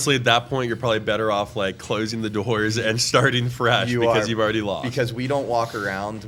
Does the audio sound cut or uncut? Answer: uncut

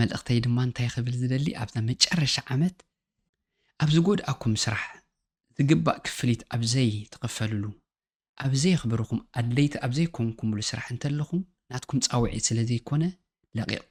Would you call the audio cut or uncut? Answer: uncut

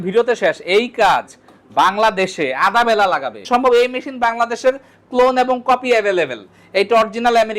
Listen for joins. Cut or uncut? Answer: cut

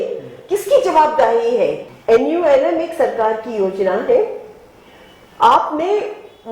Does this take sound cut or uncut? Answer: cut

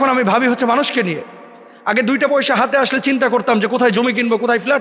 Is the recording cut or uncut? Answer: uncut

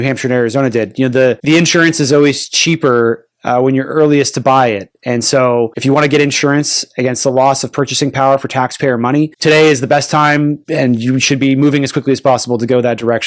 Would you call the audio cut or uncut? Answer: cut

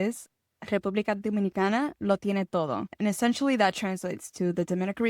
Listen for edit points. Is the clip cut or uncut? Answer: cut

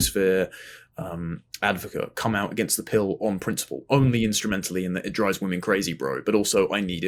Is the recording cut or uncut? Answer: uncut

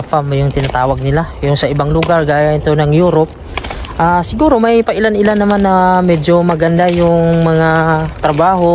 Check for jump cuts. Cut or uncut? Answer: uncut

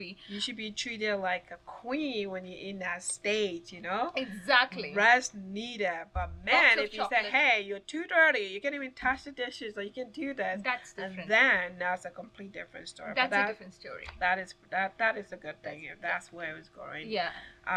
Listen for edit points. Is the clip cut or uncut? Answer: uncut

